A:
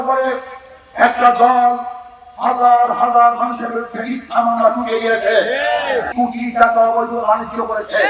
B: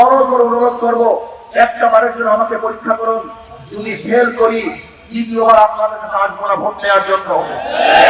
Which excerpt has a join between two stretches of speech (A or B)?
A